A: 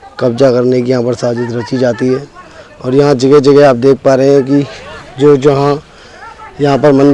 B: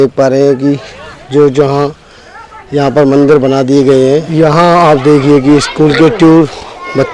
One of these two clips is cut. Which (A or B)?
B